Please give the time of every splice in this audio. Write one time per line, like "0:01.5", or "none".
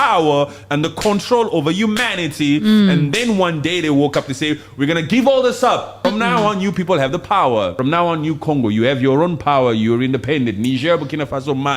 0:05.9
0:07.7